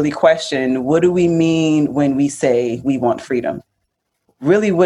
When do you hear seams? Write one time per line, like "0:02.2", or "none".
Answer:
0:03.7